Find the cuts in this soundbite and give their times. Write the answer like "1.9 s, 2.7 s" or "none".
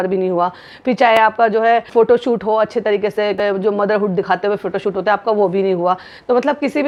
none